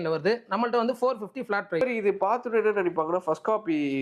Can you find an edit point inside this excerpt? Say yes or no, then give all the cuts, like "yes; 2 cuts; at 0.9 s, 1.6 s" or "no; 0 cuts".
yes; 1 cut; at 1.8 s